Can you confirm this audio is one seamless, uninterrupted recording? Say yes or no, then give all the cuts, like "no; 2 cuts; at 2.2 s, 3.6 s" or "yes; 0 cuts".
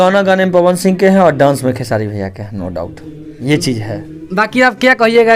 yes; 0 cuts